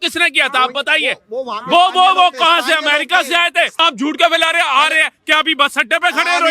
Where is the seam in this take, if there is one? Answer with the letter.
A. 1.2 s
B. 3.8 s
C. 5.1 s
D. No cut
B